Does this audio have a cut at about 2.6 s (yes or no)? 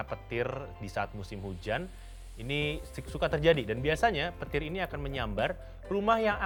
no